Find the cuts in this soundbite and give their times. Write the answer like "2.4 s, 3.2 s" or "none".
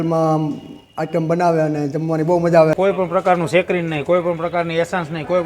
2.7 s

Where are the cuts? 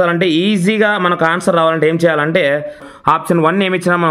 2.9 s

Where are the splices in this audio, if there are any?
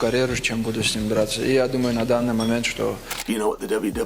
3.1 s

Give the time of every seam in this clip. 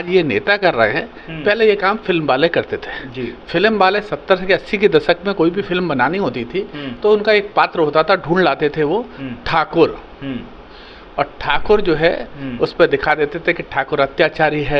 none

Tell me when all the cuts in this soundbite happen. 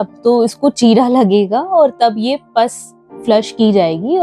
none

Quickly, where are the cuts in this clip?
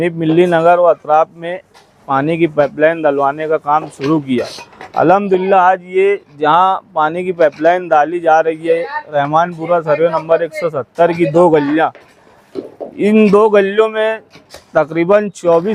none

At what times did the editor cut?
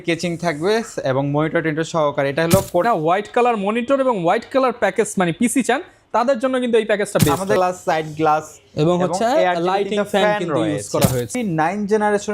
2.8 s, 7.6 s, 11.3 s

